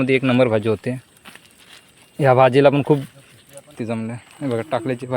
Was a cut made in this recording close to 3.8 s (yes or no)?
yes